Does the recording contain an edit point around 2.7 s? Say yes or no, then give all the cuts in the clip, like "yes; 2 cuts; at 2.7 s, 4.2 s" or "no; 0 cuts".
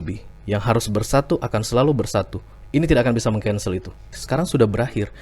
no; 1 cut; at 4.2 s